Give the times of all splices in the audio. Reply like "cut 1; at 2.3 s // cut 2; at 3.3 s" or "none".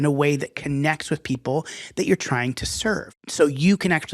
cut 1; at 3.2 s